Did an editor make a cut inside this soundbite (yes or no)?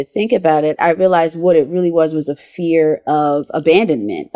no